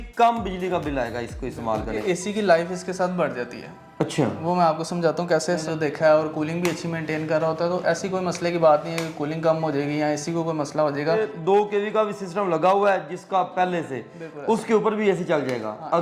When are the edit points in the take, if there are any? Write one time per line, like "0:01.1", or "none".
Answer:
0:02.0
0:05.6
0:11.3